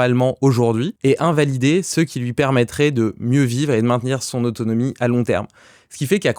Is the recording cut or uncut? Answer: cut